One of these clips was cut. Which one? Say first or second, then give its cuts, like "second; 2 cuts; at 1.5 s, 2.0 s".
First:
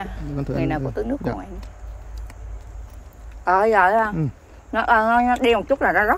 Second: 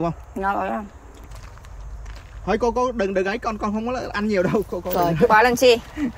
second; 1 cut; at 1.3 s